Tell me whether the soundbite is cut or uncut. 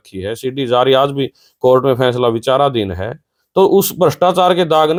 uncut